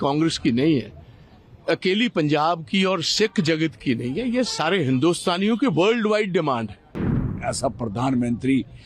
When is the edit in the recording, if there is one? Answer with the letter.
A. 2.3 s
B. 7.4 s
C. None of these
B